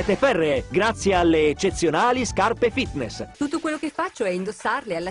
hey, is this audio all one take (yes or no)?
no